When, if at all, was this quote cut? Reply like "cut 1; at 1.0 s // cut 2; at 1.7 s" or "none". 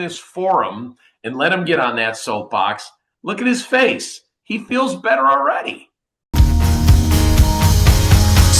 cut 1; at 6.2 s